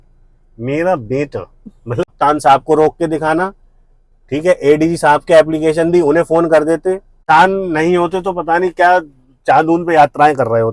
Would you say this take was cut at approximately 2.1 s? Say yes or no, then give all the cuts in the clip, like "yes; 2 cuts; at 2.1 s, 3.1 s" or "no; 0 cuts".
yes; 2 cuts; at 2.1 s, 7.2 s